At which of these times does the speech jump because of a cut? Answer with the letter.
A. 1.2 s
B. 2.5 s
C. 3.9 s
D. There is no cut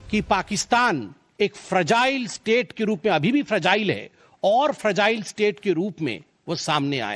A